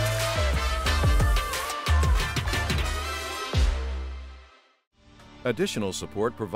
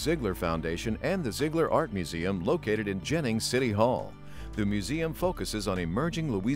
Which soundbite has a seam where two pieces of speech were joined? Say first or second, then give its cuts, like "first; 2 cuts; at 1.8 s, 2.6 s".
first; 1 cut; at 5.3 s